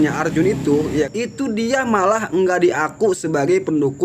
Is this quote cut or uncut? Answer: cut